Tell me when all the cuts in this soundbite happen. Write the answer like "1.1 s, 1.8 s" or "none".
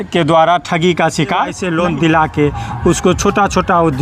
1.6 s